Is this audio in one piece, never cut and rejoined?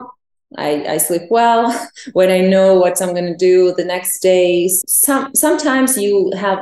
no; 1 cut; at 4.8 s

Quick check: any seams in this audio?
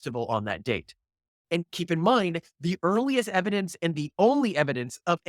yes; 1 cut; at 1.4 s

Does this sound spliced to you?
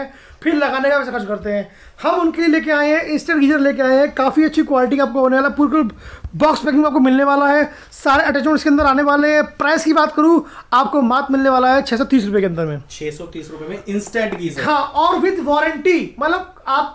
no; 0 cuts

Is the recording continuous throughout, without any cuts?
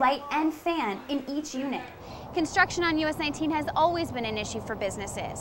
no; 1 cut; at 2.0 s

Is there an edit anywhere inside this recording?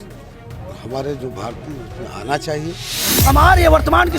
yes; 1 cut; at 3.1 s

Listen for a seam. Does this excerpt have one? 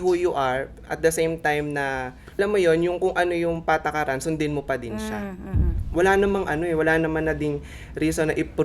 yes; 2 cuts; at 2.4 s, 5.8 s

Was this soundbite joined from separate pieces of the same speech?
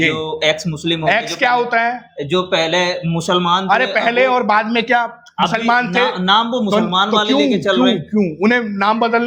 no; 0 cuts

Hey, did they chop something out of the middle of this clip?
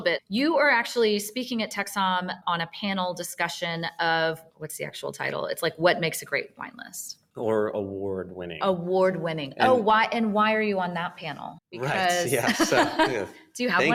no; 0 cuts

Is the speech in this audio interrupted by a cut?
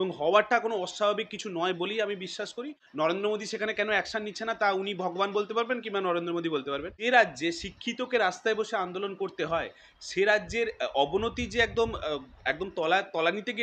yes; 2 cuts; at 2.8 s, 6.9 s

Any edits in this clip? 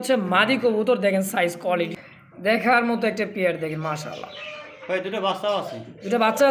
yes; 1 cut; at 1.9 s

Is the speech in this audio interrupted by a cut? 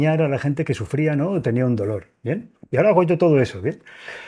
no; 0 cuts

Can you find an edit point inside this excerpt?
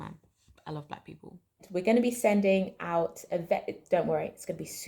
yes; 1 cut; at 1.7 s

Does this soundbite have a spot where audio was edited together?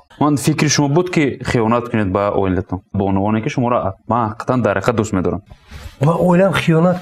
yes; 2 cuts; at 3.0 s, 5.5 s

